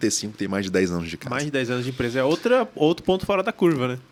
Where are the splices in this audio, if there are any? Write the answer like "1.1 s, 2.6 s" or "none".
none